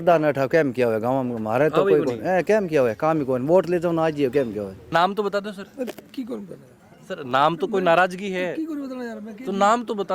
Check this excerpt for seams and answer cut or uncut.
cut